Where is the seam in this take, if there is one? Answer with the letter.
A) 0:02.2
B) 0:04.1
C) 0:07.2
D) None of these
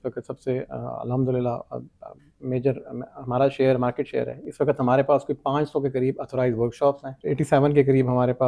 C